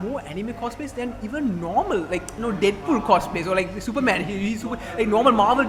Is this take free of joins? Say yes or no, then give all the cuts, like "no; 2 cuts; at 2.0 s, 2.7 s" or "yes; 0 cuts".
yes; 0 cuts